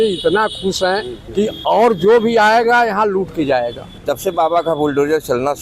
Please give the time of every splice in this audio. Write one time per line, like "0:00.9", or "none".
0:01.2
0:03.9